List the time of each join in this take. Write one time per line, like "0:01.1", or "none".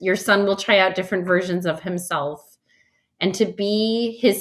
none